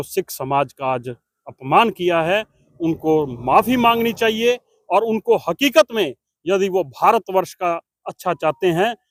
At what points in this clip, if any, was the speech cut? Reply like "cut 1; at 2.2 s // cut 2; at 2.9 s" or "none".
none